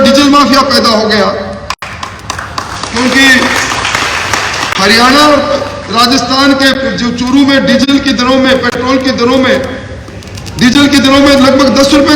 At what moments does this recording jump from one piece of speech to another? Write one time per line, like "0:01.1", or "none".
none